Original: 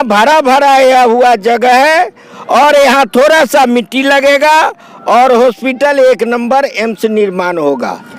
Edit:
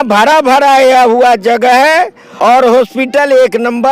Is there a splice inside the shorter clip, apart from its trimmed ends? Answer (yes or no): yes